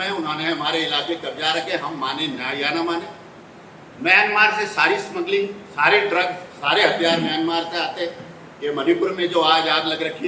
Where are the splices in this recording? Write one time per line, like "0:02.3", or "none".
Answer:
none